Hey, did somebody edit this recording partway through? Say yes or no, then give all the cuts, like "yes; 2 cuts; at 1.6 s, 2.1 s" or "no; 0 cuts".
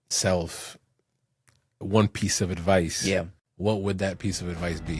yes; 1 cut; at 3.1 s